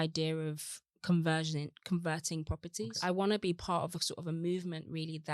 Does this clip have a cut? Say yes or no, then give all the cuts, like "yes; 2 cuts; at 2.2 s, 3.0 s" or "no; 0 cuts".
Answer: yes; 1 cut; at 3.0 s